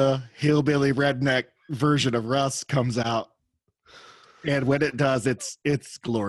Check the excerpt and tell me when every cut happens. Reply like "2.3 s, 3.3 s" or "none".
3.0 s